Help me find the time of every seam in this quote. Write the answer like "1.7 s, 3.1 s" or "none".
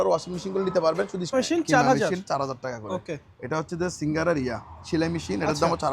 1.2 s